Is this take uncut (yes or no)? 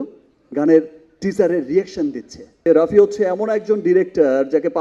no